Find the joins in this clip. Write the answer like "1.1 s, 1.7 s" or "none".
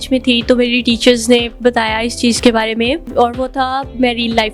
3.1 s